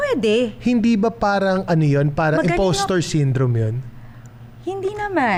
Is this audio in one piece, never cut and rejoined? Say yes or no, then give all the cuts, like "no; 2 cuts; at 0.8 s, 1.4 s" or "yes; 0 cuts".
yes; 0 cuts